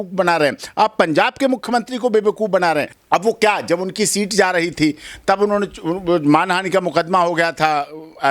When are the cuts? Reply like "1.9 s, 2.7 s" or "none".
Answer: 3.0 s